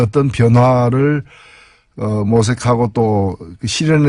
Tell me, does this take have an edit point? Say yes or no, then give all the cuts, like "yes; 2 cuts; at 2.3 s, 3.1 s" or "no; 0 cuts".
no; 0 cuts